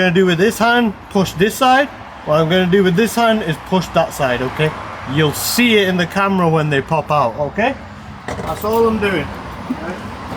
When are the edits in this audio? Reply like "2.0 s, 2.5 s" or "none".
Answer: none